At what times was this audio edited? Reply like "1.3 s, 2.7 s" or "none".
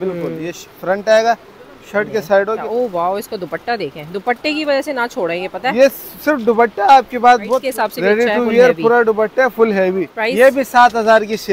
2.6 s, 7.7 s, 10.1 s

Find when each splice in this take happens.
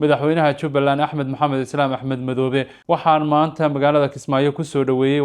2.8 s

